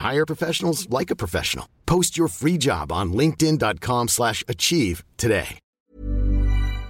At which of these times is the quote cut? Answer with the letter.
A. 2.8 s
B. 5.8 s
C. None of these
B